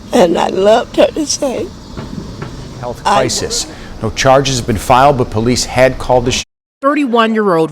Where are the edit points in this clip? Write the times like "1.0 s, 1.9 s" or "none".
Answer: 3.3 s, 6.6 s